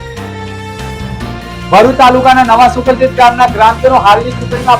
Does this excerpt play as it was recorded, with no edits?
no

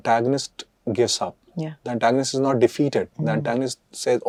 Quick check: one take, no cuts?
yes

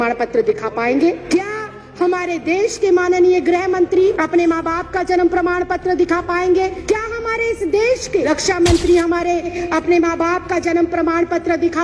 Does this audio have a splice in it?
yes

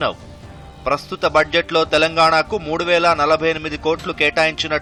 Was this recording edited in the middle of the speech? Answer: no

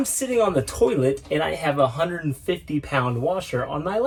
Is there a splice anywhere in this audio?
no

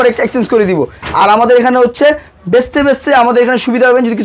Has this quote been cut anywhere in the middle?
no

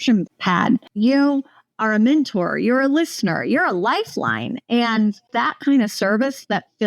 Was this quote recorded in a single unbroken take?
no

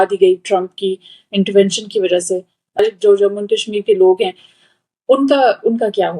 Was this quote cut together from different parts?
yes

